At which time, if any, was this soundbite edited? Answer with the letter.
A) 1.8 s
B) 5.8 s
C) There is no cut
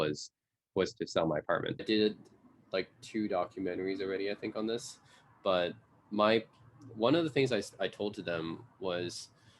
A